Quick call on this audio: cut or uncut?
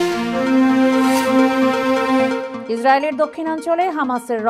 cut